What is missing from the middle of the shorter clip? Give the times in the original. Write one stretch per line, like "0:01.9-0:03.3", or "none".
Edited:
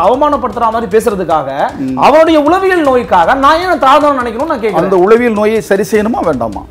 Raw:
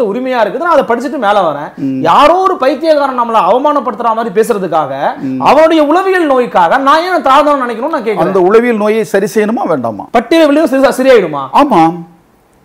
none